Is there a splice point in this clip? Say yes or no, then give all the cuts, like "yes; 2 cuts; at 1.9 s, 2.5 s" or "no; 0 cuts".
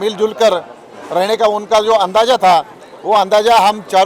no; 0 cuts